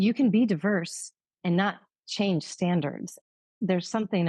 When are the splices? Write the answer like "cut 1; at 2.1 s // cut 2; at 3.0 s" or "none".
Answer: cut 1; at 3.3 s